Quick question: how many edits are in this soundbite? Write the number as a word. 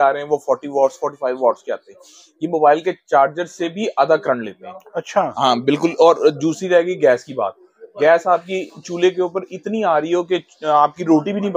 zero